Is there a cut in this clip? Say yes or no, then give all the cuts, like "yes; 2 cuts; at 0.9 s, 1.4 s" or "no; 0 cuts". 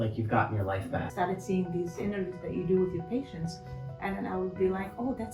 yes; 1 cut; at 1.1 s